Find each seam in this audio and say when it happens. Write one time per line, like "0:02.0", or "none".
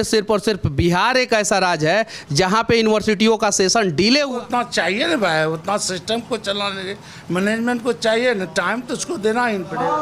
0:04.3